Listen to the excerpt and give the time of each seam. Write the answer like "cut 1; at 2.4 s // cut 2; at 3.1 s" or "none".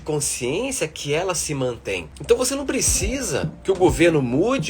cut 1; at 2.1 s // cut 2; at 3.5 s

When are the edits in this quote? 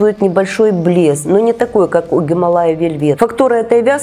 cut 1; at 1.2 s // cut 2; at 3.2 s

